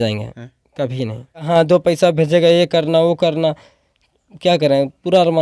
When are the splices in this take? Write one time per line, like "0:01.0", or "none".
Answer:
0:01.5